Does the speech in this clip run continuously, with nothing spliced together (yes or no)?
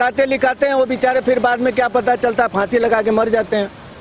yes